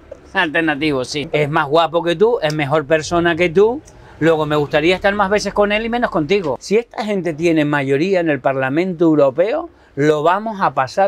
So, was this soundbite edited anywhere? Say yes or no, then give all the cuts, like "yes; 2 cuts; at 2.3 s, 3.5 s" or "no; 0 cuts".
yes; 2 cuts; at 1.2 s, 6.6 s